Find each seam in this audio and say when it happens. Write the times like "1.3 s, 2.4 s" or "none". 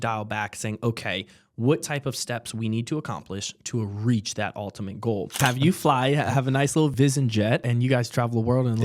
5.4 s, 6.9 s, 7.7 s